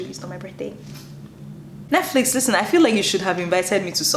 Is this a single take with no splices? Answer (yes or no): no